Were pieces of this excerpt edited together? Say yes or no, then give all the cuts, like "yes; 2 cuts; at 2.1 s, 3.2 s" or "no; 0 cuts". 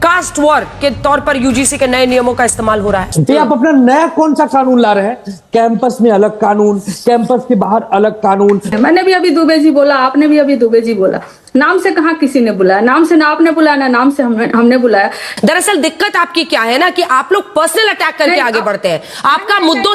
yes; 3 cuts; at 3.1 s, 8.7 s, 15.2 s